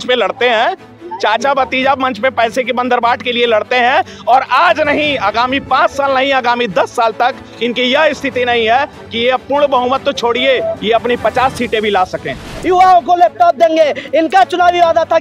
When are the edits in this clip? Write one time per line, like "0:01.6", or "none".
0:12.5